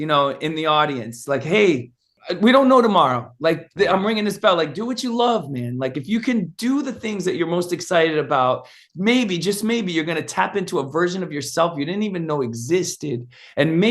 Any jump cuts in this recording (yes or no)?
yes